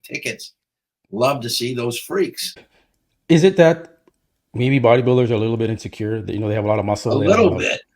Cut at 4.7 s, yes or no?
no